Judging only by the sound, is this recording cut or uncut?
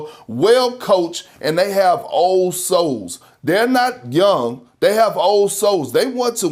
uncut